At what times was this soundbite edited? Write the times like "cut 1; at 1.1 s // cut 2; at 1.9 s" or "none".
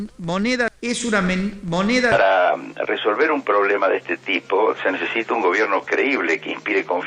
cut 1; at 2.1 s